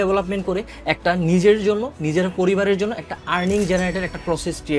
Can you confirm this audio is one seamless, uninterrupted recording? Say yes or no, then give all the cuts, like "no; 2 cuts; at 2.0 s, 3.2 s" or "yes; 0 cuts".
yes; 0 cuts